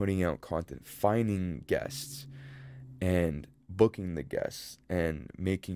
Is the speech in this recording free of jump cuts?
yes; 0 cuts

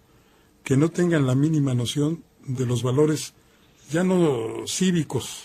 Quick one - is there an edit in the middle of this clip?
yes; 1 cut; at 1.2 s

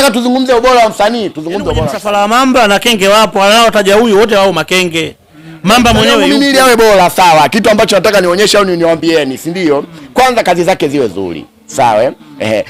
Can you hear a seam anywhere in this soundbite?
yes; 2 cuts; at 2.0 s, 6.2 s

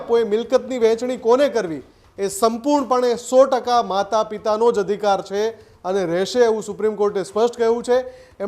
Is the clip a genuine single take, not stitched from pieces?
yes; 0 cuts

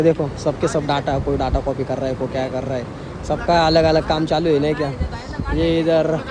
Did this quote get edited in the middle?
no; 0 cuts

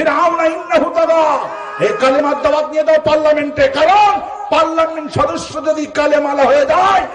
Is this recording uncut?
yes; 0 cuts

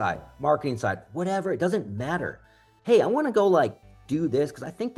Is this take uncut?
yes; 0 cuts

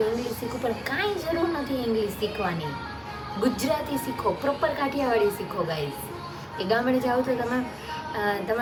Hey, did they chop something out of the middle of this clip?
no; 0 cuts

